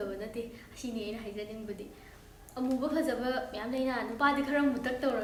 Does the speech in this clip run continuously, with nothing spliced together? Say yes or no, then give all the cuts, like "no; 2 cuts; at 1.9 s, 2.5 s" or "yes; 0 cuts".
yes; 0 cuts